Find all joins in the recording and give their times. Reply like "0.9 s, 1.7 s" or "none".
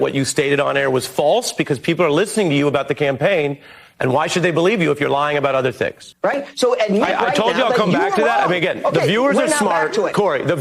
6.0 s